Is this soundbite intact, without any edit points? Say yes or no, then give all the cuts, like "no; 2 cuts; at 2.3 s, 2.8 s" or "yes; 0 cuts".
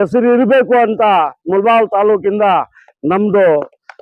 yes; 0 cuts